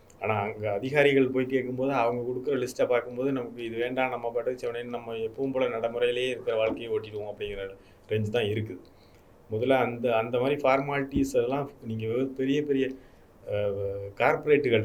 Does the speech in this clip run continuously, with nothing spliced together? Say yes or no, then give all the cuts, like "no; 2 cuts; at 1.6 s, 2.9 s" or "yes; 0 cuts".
yes; 0 cuts